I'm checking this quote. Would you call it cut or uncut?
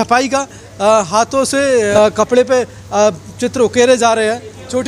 cut